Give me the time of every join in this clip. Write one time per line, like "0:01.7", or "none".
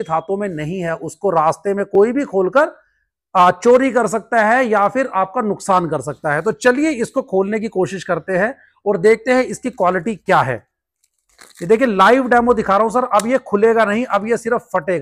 none